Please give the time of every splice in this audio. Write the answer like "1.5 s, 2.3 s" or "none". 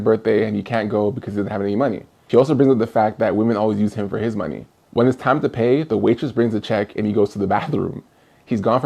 none